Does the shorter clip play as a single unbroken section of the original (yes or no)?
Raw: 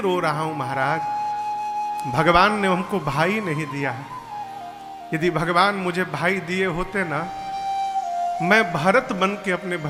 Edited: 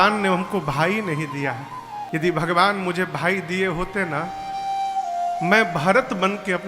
no